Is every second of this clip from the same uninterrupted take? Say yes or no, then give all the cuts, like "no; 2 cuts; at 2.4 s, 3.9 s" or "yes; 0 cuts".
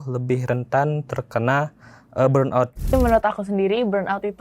no; 1 cut; at 2.9 s